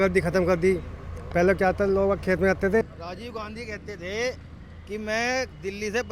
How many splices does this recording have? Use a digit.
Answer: 1